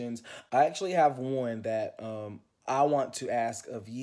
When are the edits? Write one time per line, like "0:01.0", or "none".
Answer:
none